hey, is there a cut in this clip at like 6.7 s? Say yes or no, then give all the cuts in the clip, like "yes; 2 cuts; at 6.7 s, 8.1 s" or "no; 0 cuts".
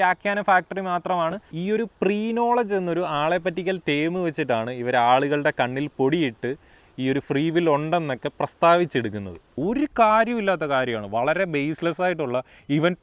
no; 2 cuts; at 1.5 s, 9.5 s